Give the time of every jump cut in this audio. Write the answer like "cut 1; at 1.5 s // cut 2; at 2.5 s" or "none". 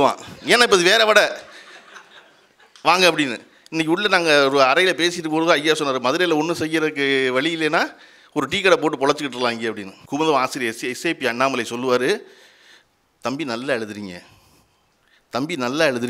cut 1; at 9.9 s